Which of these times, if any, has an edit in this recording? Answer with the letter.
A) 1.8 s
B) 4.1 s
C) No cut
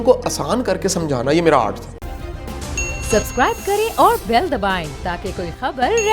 A